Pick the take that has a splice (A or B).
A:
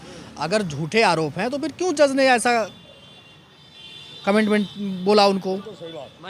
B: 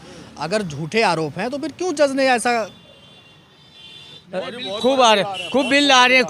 B